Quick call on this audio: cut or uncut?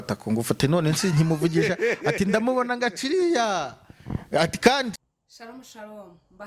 cut